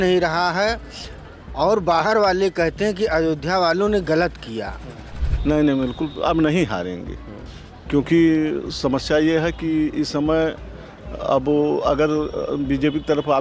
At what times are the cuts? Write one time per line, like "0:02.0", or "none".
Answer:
0:05.3